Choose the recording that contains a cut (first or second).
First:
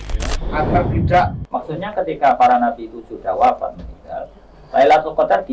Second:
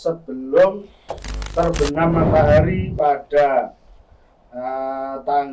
first